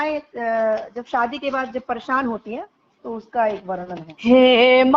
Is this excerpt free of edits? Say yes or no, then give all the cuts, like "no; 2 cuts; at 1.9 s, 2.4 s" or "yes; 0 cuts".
no; 1 cut; at 4.1 s